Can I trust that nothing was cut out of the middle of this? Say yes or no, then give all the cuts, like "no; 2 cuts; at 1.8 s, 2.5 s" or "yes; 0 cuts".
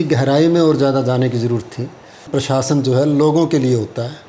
no; 1 cut; at 2.3 s